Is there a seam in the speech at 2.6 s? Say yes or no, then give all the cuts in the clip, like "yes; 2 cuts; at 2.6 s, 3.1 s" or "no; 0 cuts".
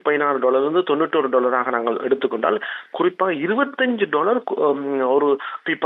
no; 0 cuts